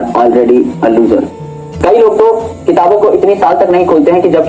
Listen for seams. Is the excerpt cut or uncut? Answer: cut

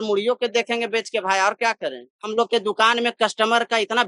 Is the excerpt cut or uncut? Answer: cut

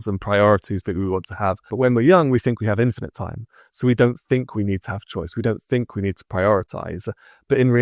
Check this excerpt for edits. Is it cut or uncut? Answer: cut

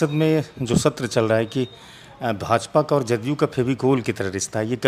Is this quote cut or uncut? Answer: uncut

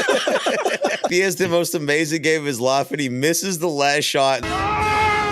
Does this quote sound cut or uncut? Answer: cut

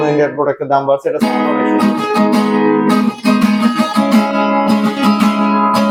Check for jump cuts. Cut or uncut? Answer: uncut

